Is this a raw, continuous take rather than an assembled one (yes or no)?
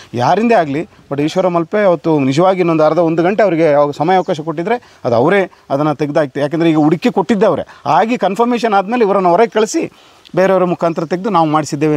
yes